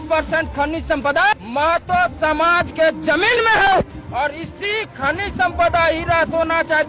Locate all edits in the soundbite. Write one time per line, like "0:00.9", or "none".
0:01.3